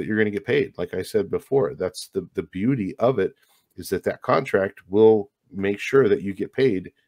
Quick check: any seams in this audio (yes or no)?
no